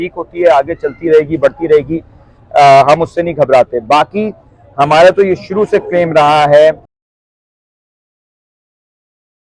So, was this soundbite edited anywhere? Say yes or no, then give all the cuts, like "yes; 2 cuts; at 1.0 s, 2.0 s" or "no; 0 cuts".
no; 0 cuts